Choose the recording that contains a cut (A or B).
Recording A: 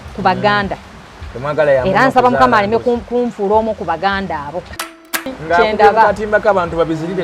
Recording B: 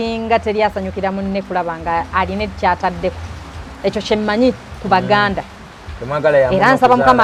A